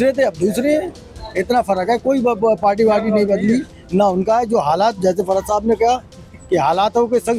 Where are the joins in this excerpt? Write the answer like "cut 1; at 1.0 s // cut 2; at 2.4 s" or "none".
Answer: none